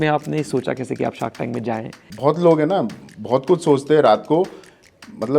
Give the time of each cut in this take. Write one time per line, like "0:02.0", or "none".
0:02.0